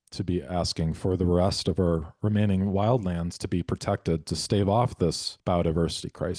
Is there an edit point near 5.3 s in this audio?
yes; 1 cut; at 5.3 s

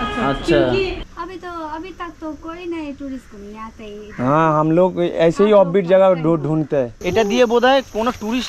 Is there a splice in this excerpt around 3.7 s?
no; 2 cuts; at 1.0 s, 7.0 s

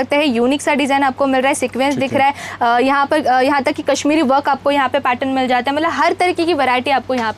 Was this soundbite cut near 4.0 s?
no; 0 cuts

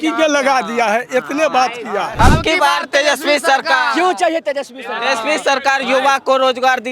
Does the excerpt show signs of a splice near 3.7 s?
no; 1 cut; at 2.1 s

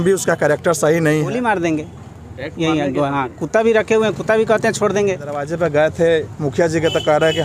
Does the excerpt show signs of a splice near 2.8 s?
no; 2 cuts; at 1.4 s, 5.5 s

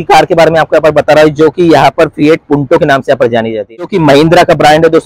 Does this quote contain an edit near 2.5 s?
no; 1 cut; at 3.8 s

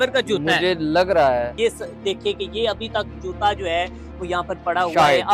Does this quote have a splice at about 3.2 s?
no; 1 cut; at 1.5 s

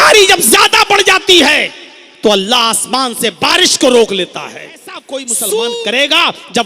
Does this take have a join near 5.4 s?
yes; 1 cut; at 5.4 s

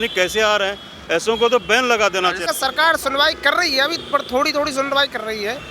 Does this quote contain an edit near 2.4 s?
yes; 1 cut; at 2.4 s

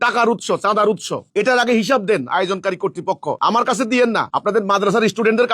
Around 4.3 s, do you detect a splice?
yes; 2 cuts; at 3.4 s, 4.3 s

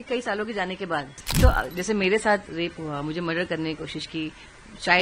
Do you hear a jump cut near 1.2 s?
yes; 1 cut; at 1.2 s

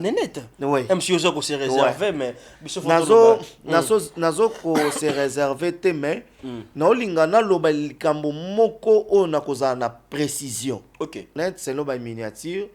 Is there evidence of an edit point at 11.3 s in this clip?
yes; 1 cut; at 11.3 s

